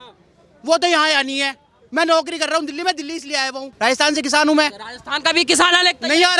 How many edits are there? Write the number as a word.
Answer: one